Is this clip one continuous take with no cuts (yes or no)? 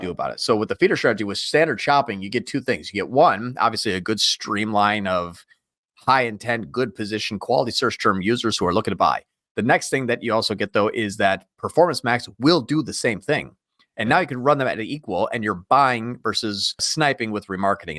no